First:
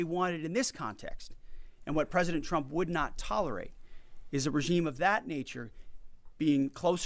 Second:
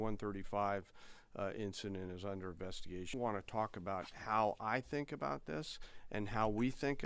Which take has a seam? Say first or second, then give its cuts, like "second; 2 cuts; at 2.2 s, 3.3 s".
second; 1 cut; at 3.1 s